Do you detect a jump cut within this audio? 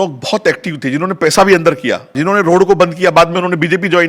yes; 1 cut; at 2.2 s

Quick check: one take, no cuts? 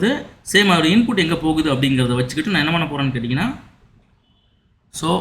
no; 1 cut; at 3.2 s

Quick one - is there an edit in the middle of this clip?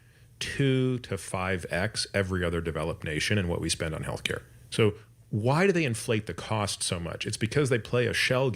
yes; 1 cut; at 4.5 s

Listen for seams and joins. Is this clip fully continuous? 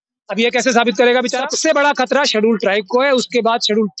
no; 1 cut; at 1.5 s

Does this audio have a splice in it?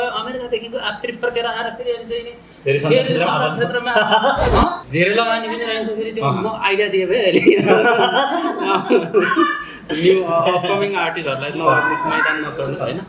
yes; 1 cut; at 4.8 s

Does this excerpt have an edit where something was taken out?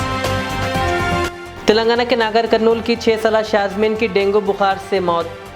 yes; 1 cut; at 1.2 s

